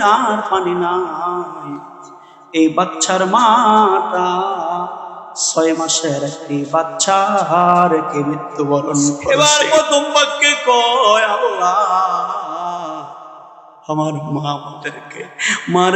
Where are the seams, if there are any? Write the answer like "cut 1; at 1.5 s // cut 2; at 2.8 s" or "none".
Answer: cut 1; at 9.3 s

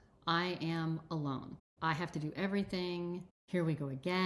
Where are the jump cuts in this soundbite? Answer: cut 1; at 1.6 s // cut 2; at 3.3 s

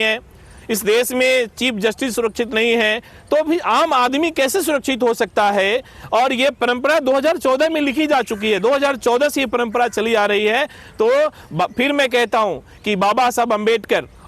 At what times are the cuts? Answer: none

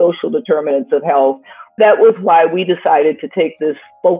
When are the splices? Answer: cut 1; at 1.8 s

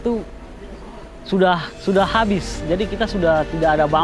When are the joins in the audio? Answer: none

